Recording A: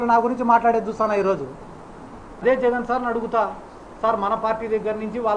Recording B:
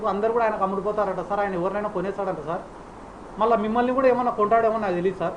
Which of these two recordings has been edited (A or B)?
A